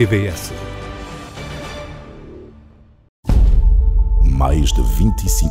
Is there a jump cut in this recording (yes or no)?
yes